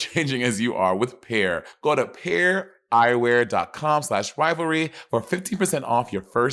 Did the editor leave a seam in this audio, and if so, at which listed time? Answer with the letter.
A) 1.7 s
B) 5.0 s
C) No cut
A